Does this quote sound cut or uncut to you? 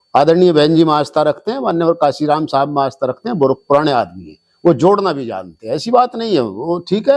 uncut